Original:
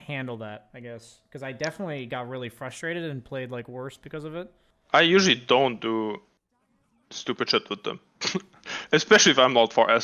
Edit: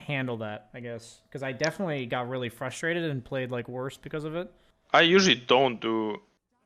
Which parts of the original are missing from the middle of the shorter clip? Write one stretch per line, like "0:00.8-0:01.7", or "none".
none